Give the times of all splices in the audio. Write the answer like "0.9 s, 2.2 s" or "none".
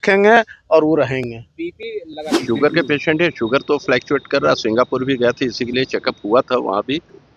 2.4 s, 5.7 s